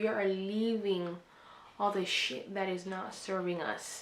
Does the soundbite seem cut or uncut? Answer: uncut